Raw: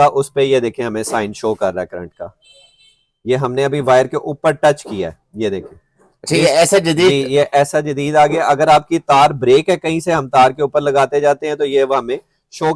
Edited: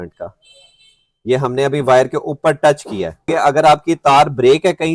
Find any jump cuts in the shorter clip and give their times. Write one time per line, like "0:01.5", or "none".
0:03.3